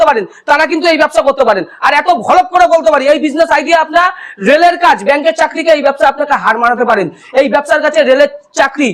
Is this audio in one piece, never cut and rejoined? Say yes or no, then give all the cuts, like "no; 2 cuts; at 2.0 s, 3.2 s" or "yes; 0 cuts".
yes; 0 cuts